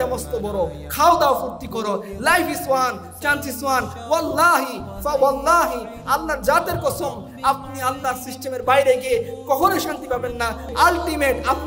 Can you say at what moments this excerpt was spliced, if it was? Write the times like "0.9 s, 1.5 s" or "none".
10.7 s